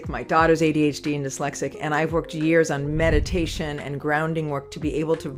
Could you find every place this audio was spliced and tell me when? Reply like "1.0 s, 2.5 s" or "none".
none